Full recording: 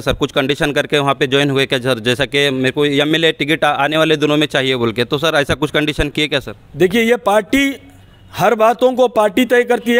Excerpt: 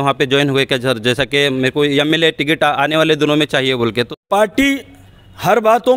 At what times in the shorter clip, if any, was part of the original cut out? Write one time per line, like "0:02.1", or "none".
0:04.2

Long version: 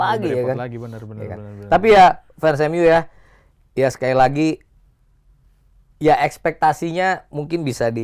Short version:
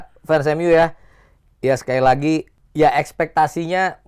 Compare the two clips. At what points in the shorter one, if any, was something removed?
0:02.6

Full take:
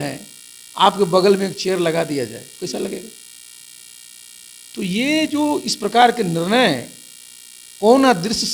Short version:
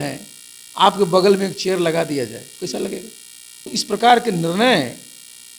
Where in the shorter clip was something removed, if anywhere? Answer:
0:03.8

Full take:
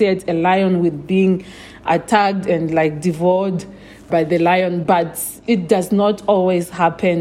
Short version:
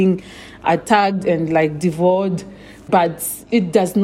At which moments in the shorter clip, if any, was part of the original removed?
0:02.8

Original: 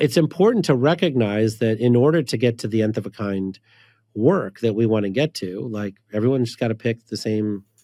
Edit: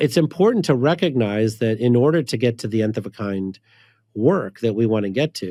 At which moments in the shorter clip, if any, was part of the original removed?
none

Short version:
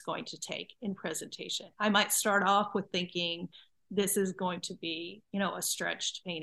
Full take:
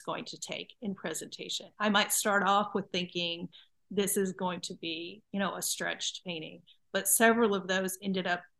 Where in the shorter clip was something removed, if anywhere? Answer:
none

